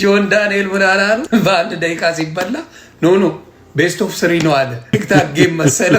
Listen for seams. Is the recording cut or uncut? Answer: cut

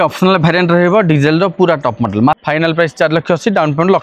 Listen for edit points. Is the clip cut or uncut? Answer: cut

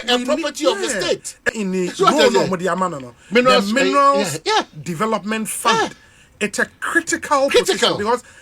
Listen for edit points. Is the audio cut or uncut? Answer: cut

